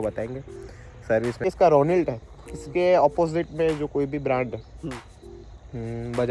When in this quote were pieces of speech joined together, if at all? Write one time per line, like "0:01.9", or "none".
0:01.5

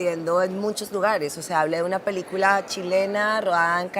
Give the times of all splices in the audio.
0:02.3

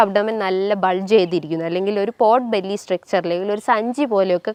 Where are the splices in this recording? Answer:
none

